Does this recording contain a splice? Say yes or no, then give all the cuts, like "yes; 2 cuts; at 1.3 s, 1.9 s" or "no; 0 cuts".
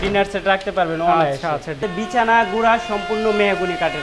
yes; 1 cut; at 1.8 s